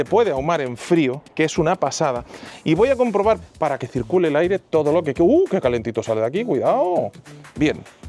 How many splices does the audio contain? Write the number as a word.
one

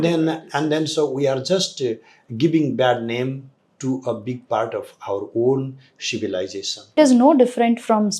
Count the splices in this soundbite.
one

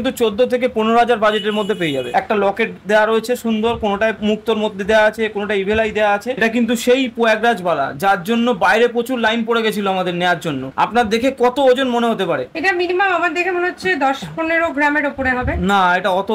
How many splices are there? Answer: three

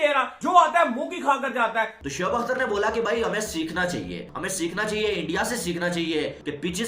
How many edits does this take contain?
one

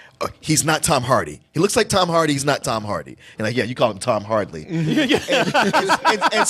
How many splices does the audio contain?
zero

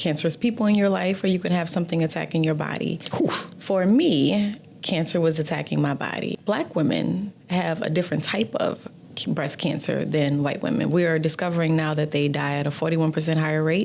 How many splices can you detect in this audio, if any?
one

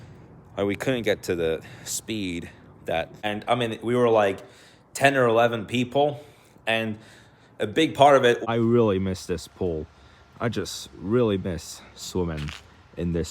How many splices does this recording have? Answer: two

